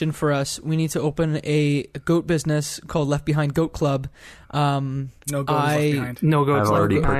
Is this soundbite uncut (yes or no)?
yes